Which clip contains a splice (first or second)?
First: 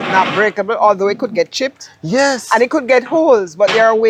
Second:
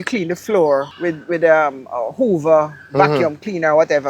second